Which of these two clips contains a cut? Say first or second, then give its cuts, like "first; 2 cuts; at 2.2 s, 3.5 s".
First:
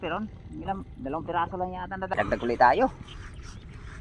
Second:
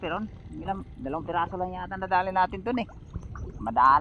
first; 1 cut; at 2.1 s